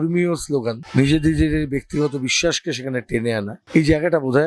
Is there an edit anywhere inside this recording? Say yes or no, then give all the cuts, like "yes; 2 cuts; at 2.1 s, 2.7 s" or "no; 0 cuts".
yes; 2 cuts; at 0.8 s, 3.6 s